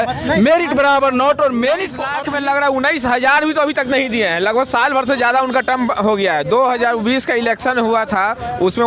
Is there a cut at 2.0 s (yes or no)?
yes